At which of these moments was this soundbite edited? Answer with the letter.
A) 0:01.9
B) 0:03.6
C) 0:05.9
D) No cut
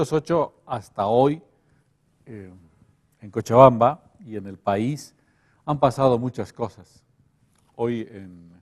C